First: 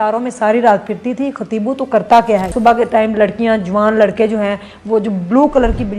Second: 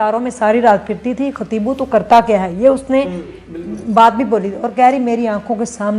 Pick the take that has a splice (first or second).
first